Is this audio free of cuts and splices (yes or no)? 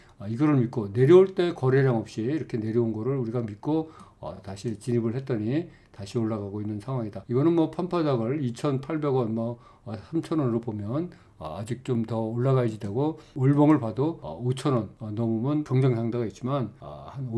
no